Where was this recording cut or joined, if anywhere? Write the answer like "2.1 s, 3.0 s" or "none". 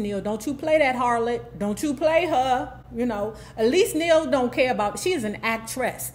none